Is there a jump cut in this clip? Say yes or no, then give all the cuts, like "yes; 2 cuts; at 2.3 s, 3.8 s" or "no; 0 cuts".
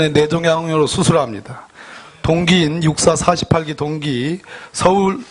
no; 0 cuts